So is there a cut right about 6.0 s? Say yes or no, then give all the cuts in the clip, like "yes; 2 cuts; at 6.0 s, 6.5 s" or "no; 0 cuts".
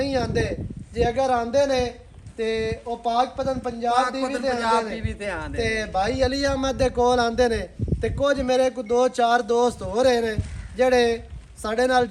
no; 0 cuts